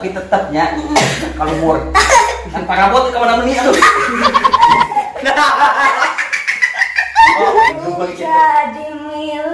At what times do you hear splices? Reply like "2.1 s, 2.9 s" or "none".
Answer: 7.7 s